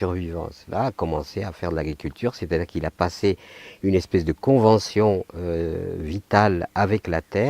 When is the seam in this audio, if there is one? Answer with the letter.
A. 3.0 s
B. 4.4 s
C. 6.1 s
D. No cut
B